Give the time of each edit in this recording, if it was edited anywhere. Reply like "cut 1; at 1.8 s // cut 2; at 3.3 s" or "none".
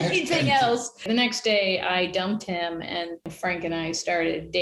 cut 1; at 1.1 s // cut 2; at 3.3 s